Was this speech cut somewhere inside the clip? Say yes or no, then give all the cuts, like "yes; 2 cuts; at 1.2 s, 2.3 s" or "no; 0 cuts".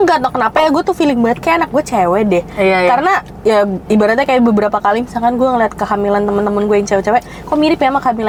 no; 0 cuts